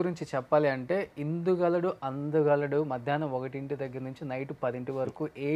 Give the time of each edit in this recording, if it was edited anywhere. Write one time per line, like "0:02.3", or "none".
none